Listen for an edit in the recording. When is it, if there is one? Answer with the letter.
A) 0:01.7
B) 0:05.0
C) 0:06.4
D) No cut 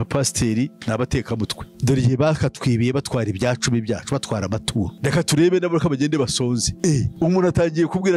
A